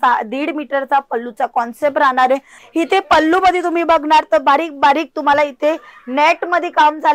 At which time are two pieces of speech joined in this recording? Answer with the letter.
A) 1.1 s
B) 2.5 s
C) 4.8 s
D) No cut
B